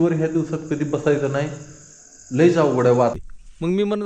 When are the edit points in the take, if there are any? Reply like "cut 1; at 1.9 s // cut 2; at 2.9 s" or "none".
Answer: cut 1; at 3.1 s